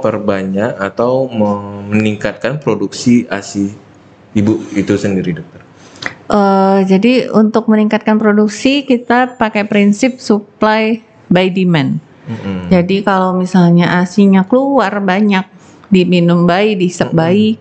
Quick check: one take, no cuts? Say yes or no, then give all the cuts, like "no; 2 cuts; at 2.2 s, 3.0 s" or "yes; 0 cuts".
yes; 0 cuts